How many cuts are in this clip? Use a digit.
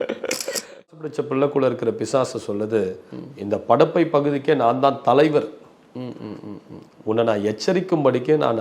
1